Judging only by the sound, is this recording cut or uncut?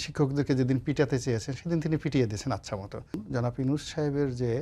cut